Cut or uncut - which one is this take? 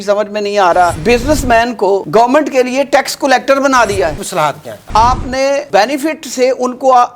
cut